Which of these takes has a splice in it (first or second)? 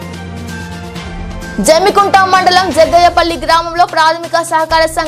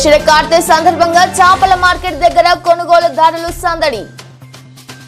first